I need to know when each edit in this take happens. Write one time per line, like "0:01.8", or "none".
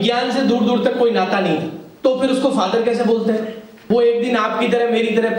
0:01.8
0:03.7